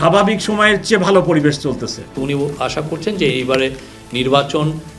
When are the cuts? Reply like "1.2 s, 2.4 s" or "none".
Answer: 2.1 s